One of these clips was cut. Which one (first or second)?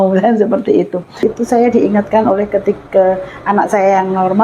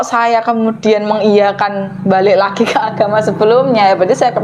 first